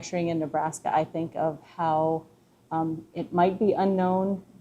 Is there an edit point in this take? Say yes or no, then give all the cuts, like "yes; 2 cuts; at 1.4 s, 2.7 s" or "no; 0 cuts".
no; 0 cuts